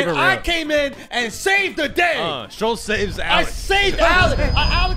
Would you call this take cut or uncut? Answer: uncut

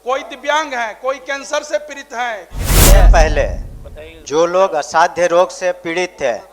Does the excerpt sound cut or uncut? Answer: cut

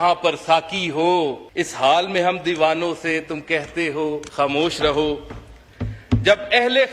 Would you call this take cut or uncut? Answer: cut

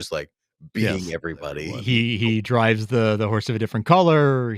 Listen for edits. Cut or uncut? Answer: cut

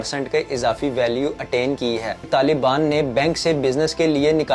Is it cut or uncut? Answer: cut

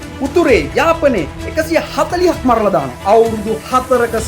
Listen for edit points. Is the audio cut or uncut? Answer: cut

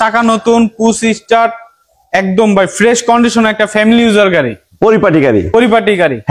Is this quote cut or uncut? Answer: uncut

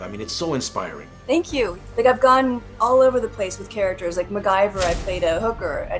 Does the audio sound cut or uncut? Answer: cut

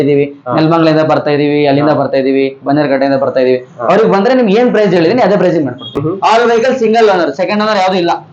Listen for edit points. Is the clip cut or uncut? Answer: cut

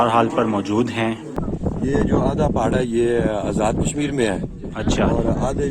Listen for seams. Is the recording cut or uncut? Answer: cut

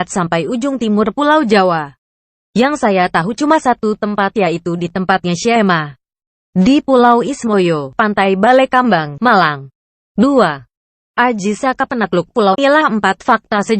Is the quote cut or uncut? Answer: uncut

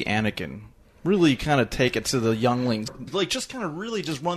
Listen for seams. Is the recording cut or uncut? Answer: cut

